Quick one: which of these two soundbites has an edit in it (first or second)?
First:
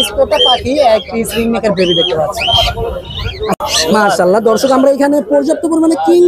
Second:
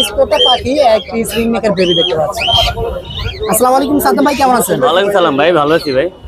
first